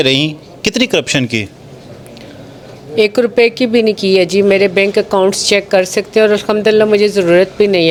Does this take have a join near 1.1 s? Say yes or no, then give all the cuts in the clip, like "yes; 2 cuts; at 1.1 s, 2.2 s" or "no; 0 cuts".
no; 0 cuts